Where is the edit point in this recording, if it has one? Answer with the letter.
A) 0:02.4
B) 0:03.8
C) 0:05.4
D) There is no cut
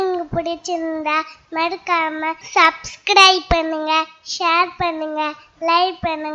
A